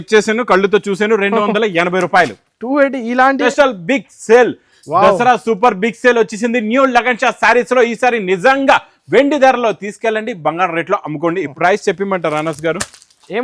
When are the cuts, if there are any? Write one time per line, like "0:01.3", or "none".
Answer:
0:03.4
0:11.5